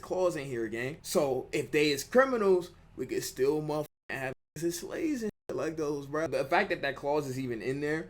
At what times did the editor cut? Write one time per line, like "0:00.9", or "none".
0:06.3